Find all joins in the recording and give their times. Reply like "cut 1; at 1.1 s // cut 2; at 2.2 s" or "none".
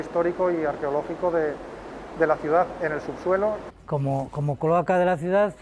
cut 1; at 3.7 s